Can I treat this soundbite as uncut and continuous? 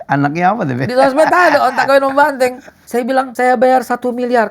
no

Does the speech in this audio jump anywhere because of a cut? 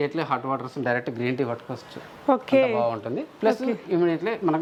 no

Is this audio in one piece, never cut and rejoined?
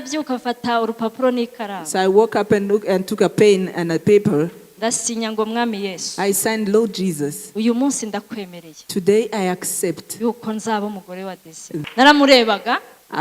no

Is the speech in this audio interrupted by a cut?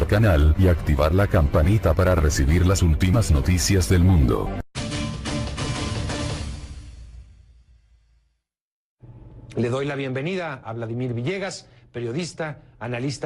yes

